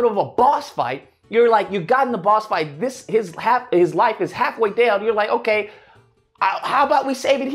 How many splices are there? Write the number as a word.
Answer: one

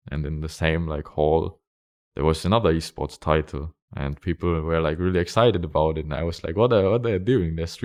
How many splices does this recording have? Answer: zero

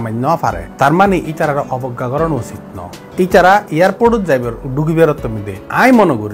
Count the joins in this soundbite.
zero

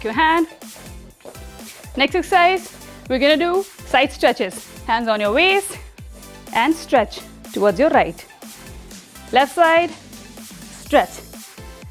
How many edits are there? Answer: zero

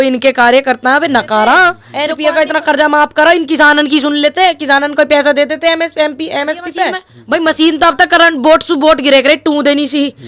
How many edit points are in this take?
two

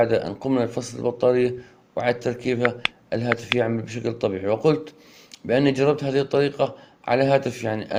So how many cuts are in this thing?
zero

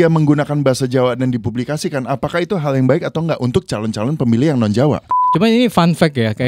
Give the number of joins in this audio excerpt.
one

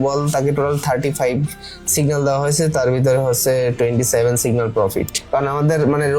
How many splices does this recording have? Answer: one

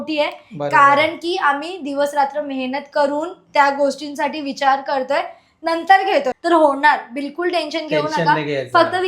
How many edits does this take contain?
one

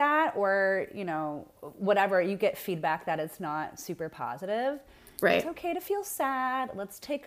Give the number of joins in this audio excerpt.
zero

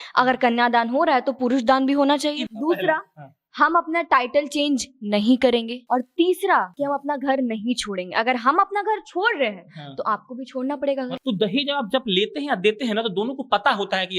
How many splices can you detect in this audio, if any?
three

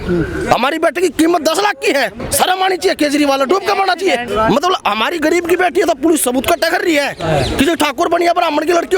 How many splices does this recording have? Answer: two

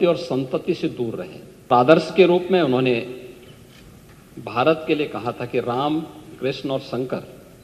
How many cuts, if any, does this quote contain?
one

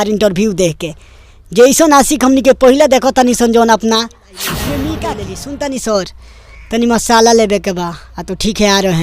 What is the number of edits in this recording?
one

